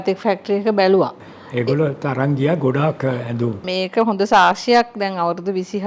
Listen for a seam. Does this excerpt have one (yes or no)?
yes